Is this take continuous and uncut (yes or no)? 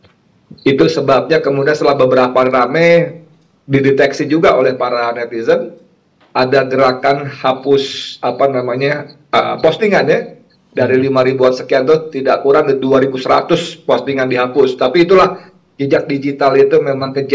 yes